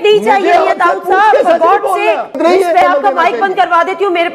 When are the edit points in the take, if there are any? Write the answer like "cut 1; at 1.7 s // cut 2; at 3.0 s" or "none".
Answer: cut 1; at 2.3 s